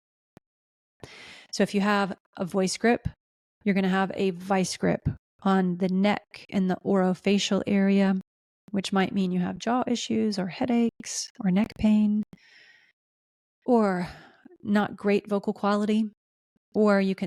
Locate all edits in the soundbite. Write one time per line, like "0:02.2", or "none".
none

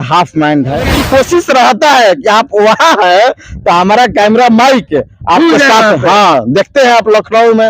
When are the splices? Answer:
0:01.0

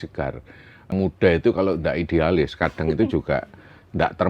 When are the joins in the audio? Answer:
0:00.9

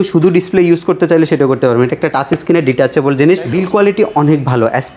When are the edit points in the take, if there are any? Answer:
0:03.5

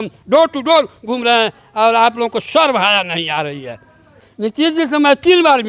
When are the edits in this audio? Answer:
0:04.2

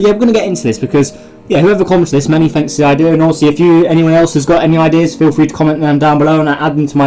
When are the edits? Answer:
0:02.7

